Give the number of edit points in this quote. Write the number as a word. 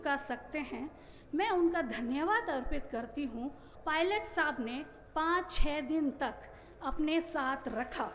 one